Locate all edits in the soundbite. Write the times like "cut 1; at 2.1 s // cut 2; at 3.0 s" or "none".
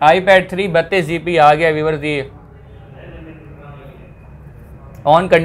none